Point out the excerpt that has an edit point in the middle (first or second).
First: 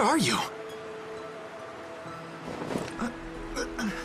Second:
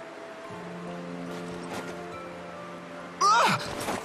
second